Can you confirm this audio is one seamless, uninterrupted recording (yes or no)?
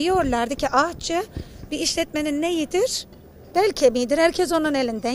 yes